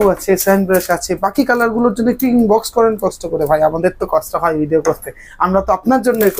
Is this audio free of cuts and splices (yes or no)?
yes